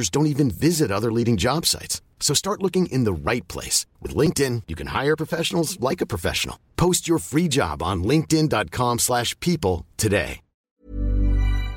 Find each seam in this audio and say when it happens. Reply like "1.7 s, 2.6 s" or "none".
10.8 s

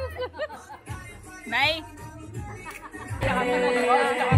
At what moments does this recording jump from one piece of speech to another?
3.2 s

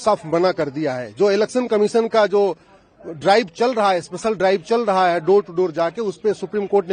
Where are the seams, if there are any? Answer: none

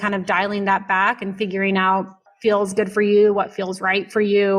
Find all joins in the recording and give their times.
2.3 s

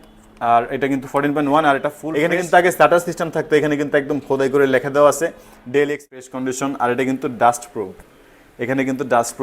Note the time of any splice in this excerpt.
2.0 s, 6.1 s

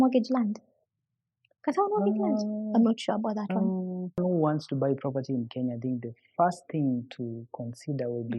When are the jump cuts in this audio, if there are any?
4.2 s

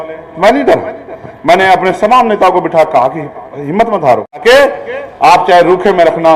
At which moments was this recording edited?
4.4 s

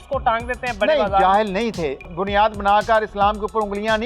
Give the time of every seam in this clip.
2.1 s

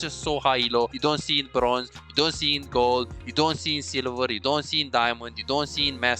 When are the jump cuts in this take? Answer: 0.9 s

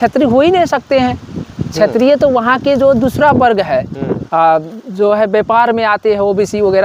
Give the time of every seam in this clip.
4.2 s

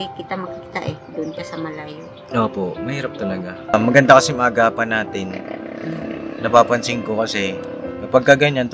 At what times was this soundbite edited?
3.7 s

